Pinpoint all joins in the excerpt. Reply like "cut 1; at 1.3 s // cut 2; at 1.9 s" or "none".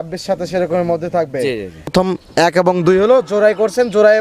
cut 1; at 1.9 s